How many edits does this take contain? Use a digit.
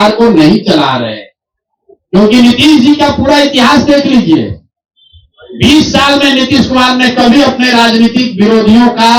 0